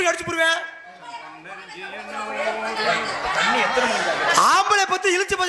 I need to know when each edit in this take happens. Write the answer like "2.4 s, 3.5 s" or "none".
none